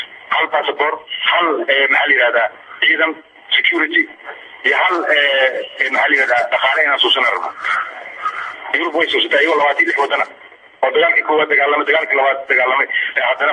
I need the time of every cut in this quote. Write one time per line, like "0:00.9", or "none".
none